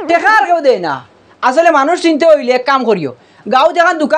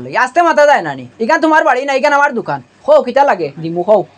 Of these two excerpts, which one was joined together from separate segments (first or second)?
first